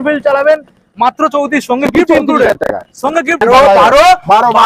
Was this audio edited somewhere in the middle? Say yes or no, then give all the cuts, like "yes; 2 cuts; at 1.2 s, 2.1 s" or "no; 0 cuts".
yes; 1 cut; at 3.4 s